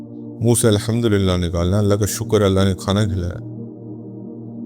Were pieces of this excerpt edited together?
yes; 1 cut; at 3.1 s

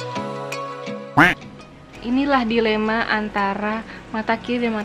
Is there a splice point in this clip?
yes; 1 cut; at 1.9 s

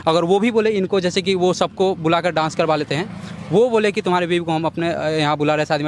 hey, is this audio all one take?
yes; 0 cuts

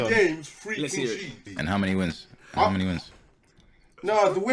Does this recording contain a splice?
yes; 1 cut; at 1.5 s

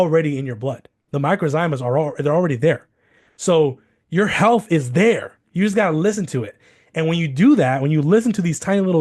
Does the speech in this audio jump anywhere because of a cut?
yes; 1 cut; at 0.9 s

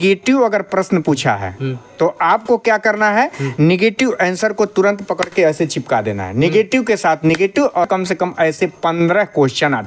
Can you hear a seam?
yes; 1 cut; at 7.9 s

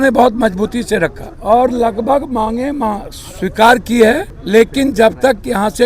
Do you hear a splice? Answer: yes; 2 cuts; at 1.3 s, 4.3 s

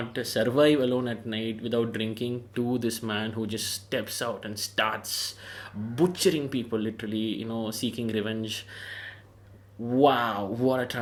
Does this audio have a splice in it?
no; 0 cuts

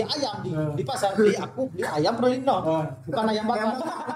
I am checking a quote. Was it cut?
no; 0 cuts

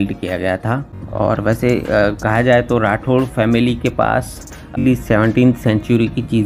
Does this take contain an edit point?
yes; 2 cuts; at 1.0 s, 4.8 s

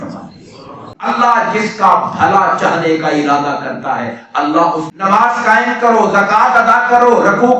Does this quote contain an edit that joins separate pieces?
yes; 2 cuts; at 0.9 s, 4.9 s

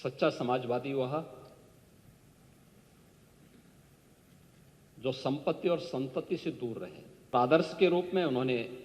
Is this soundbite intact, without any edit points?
no; 1 cut; at 7.3 s

